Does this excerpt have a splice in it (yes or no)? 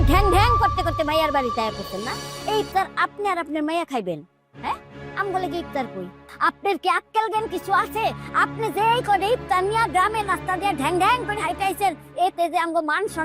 no